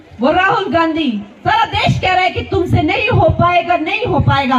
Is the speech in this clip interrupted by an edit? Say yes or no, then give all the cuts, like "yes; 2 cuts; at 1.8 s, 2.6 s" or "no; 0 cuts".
no; 0 cuts